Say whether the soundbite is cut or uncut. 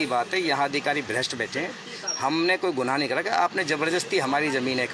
uncut